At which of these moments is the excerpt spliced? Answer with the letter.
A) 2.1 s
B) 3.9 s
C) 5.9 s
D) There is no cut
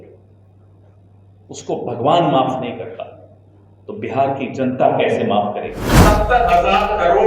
C